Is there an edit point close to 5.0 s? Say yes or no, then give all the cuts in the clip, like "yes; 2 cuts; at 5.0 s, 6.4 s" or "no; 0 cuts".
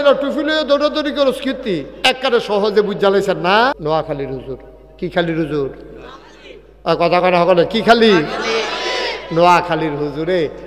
no; 1 cut; at 3.8 s